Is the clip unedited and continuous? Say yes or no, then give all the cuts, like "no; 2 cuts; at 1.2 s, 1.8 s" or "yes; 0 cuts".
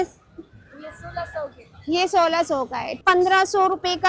no; 1 cut; at 2.9 s